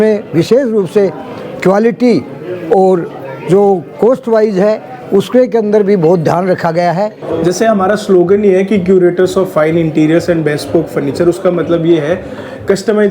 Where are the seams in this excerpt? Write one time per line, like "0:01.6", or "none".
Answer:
0:07.2